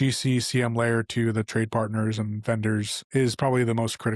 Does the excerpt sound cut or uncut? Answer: cut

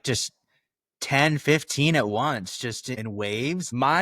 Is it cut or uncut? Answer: cut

